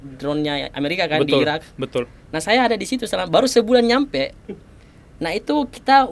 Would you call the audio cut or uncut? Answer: uncut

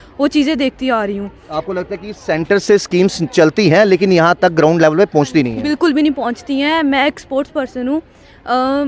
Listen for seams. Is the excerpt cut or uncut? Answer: uncut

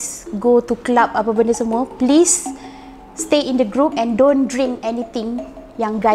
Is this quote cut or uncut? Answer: uncut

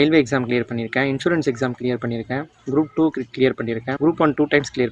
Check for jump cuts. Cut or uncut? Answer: cut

